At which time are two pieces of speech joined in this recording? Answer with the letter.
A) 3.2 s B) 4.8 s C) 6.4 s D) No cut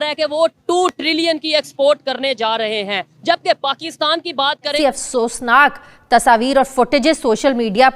B